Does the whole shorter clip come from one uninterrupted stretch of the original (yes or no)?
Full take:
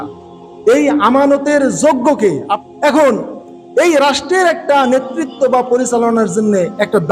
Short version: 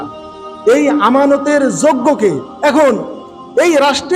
no